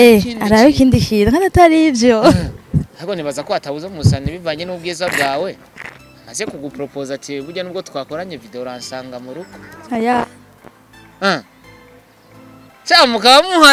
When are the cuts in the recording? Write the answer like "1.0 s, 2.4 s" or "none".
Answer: none